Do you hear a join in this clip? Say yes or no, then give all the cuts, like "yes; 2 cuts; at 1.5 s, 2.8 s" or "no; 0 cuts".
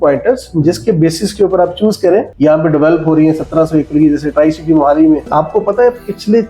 yes; 2 cuts; at 2.3 s, 5.3 s